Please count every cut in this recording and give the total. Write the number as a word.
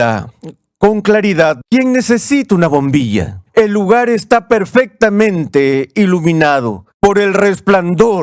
three